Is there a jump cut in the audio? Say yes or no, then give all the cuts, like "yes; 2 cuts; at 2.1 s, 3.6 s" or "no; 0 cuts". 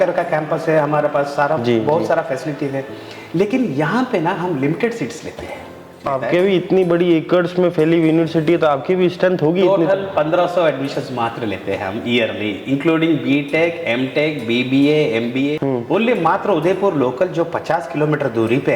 yes; 2 cuts; at 6.0 s, 15.5 s